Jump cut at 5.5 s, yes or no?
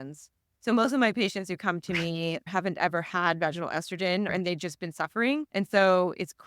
yes